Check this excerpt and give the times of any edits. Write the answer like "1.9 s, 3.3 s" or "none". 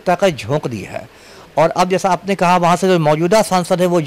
none